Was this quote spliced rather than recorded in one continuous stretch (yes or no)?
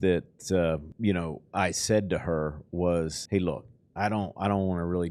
yes